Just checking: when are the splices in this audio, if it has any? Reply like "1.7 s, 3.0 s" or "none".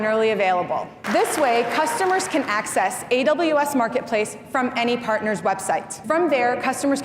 1.0 s, 6.0 s

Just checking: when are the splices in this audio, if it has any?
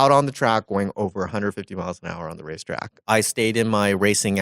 2.9 s

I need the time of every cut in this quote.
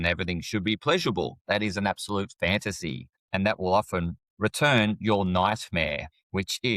3.1 s, 4.2 s

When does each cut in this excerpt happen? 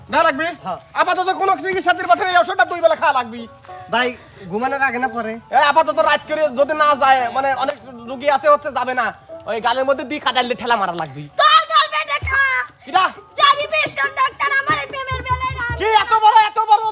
none

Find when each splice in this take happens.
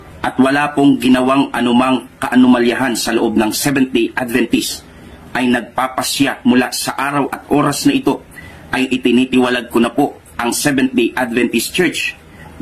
none

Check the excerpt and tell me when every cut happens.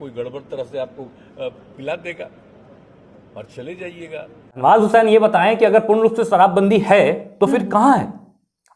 4.6 s

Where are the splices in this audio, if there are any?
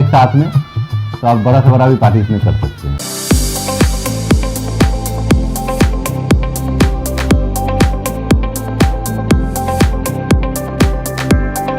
2.9 s

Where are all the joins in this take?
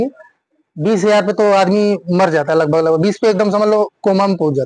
none

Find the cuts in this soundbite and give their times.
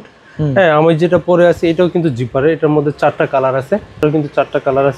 4.0 s

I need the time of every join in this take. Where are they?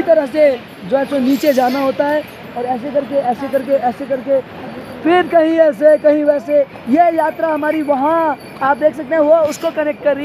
none

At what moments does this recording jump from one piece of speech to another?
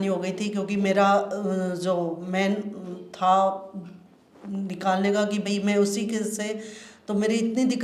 none

